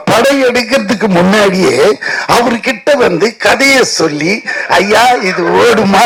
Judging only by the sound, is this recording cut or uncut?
uncut